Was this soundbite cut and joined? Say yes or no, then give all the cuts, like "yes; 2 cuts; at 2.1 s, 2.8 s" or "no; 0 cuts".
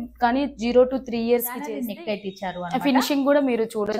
yes; 1 cut; at 1.8 s